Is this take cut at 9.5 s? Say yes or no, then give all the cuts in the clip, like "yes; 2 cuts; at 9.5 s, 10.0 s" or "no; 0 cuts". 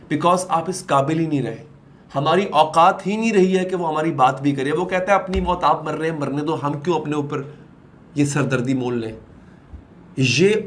no; 0 cuts